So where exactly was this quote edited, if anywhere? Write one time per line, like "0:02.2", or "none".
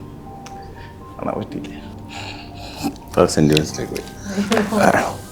none

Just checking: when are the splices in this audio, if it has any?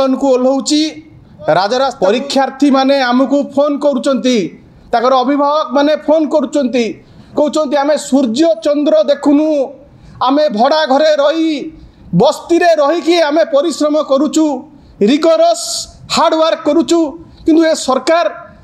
0:01.9

